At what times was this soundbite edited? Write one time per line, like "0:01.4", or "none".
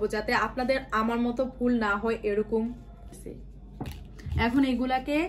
0:03.0